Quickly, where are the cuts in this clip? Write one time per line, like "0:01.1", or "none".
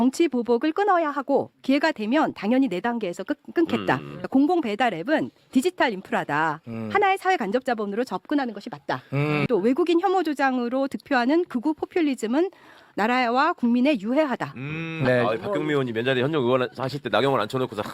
0:04.1
0:09.4
0:15.0

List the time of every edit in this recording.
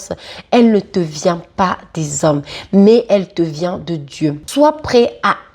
0:04.4

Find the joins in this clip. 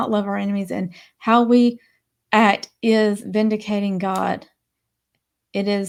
none

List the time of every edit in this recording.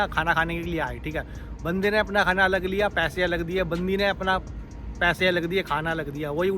none

